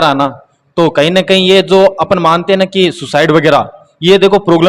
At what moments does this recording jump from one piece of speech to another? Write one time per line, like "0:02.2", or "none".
none